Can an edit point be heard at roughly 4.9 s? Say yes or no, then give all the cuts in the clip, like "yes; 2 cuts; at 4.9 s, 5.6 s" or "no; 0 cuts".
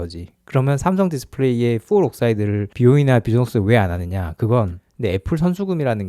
yes; 1 cut; at 4.9 s